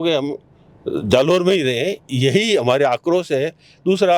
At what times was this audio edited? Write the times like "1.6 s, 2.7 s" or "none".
none